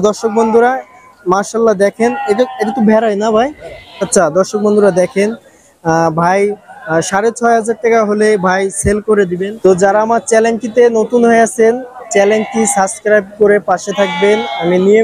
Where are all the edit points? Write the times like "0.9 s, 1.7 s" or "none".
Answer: 4.1 s, 9.4 s